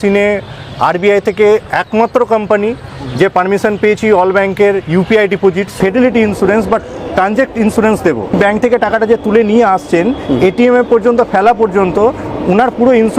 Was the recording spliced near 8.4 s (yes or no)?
yes